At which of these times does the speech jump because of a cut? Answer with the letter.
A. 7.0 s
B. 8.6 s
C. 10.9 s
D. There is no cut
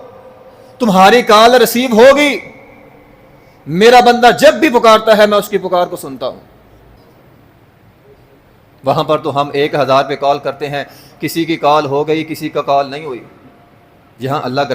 A